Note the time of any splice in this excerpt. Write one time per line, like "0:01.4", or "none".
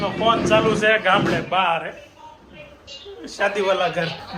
none